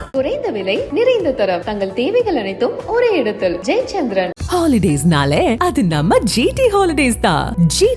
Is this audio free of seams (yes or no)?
yes